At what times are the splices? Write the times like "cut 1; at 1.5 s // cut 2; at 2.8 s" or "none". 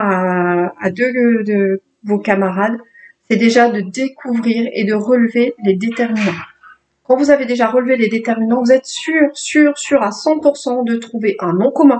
none